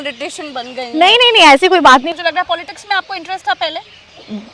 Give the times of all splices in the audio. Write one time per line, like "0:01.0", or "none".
0:02.1